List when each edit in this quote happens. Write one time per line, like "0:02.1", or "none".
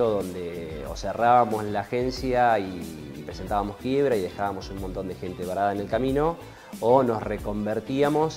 none